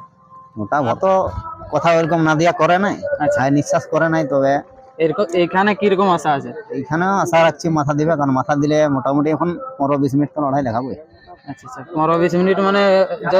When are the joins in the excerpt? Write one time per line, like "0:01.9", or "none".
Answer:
0:01.0